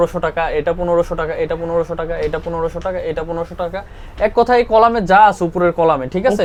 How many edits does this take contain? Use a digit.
0